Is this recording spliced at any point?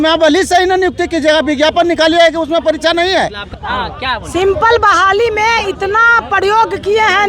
yes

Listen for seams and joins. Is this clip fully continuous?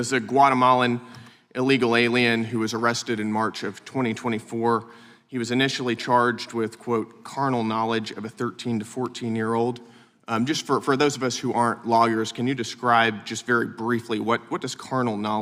yes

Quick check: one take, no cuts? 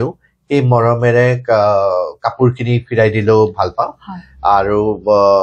yes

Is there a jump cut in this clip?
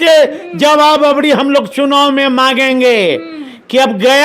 yes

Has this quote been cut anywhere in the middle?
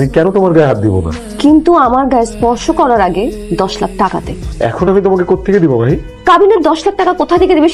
no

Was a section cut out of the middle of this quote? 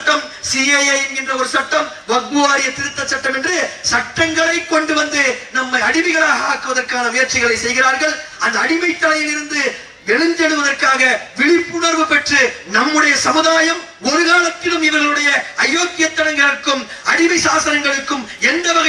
no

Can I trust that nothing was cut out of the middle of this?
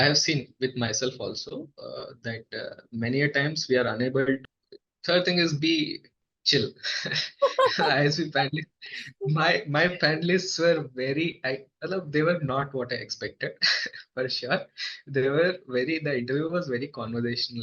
no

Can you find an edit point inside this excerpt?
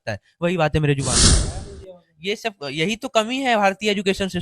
yes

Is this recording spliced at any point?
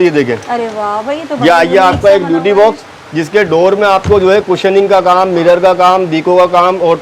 no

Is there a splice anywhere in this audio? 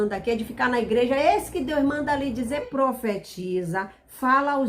yes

